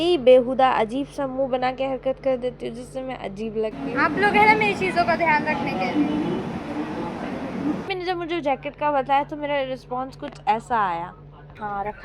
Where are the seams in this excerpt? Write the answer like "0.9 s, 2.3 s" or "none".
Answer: 3.8 s, 7.9 s

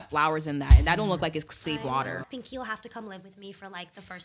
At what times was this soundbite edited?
2.3 s

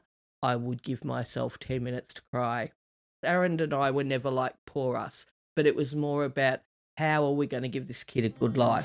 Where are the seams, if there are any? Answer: 3.2 s

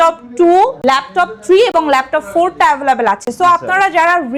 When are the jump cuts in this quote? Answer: none

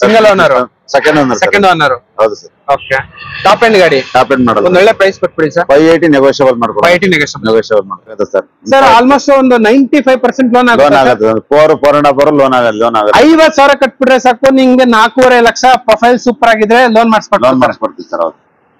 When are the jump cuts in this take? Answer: 8.2 s

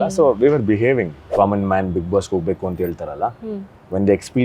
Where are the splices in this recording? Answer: 1.2 s

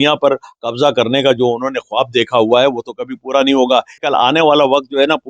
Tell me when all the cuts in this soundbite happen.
4.0 s

